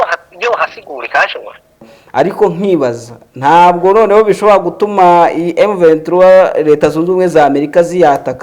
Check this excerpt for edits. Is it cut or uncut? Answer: cut